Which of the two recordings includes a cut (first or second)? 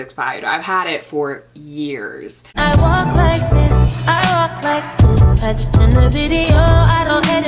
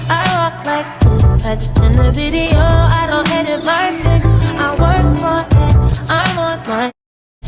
first